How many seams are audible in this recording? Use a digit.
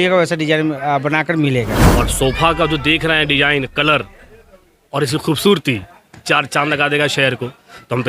1